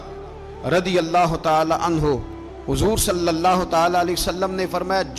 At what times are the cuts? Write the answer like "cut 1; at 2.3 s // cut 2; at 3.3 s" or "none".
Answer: none